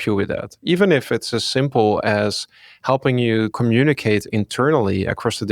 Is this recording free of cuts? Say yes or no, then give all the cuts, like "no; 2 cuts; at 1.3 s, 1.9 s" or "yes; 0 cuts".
no; 1 cut; at 3.5 s